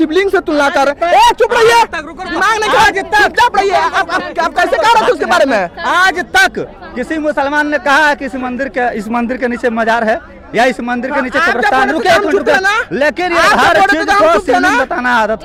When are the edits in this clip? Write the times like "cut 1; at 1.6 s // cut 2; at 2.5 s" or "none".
none